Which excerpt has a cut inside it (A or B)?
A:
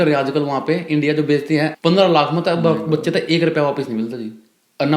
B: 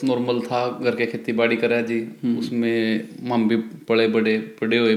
A